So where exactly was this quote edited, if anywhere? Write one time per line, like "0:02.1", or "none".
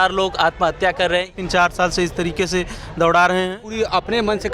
0:01.4
0:03.7